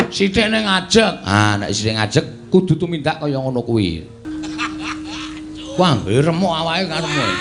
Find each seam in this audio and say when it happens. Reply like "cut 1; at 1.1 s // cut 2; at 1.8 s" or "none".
cut 1; at 4.1 s